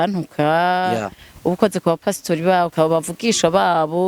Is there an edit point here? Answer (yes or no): yes